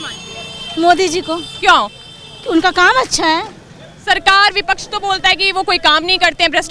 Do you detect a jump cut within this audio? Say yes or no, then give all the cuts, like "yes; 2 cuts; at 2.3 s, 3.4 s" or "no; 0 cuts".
no; 0 cuts